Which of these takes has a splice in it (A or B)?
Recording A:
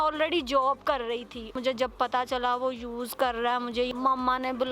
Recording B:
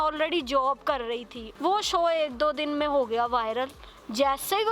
A